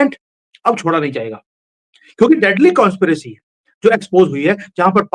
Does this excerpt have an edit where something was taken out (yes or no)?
no